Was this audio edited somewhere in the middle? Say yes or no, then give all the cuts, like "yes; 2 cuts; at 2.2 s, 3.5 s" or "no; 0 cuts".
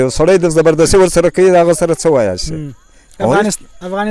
no; 0 cuts